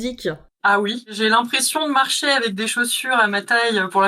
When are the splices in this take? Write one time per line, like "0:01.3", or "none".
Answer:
0:01.2

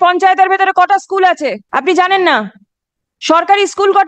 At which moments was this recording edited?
0:01.6

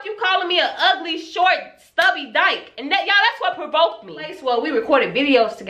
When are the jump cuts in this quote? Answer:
0:04.4

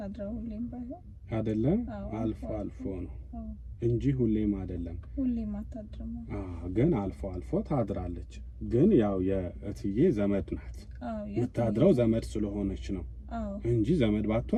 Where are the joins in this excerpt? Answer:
none

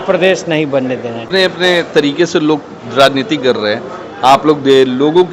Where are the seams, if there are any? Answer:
0:01.2

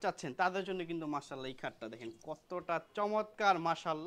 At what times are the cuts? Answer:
none

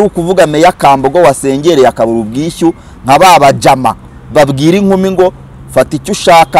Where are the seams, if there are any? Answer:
none

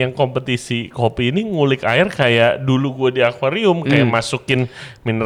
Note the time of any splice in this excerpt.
none

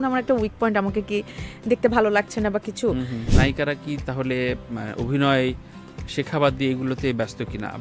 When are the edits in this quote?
0:03.3

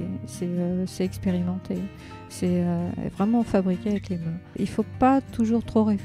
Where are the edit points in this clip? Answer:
0:04.5

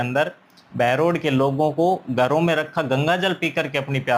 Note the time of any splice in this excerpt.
none

